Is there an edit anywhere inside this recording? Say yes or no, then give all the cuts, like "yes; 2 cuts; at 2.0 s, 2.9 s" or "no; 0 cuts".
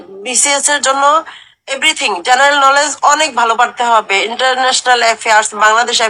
no; 0 cuts